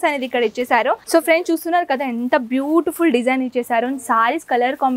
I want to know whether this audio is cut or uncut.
cut